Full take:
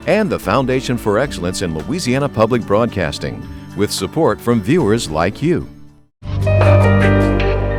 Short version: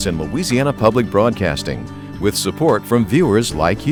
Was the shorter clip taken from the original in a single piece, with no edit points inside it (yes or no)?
yes